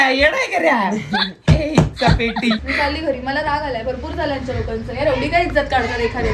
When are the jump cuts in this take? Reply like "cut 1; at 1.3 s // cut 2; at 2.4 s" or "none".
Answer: cut 1; at 2.6 s